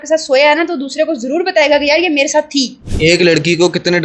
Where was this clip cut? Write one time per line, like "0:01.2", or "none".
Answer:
0:02.8